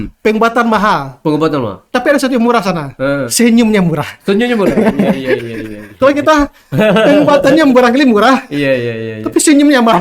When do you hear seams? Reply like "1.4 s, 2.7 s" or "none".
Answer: none